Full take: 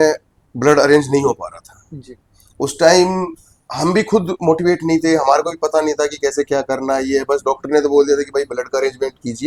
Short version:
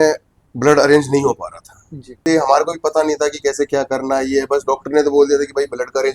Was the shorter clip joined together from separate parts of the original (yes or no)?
yes